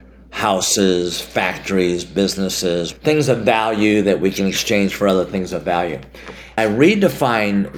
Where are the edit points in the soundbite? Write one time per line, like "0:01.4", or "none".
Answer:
0:02.9
0:06.6